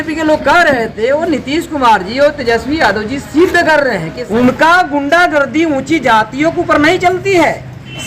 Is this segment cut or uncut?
cut